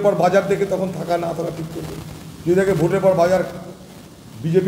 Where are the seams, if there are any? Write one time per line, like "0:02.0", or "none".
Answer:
none